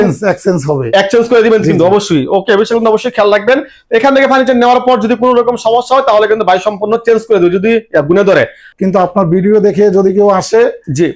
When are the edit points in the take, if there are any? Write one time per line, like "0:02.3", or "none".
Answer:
0:08.7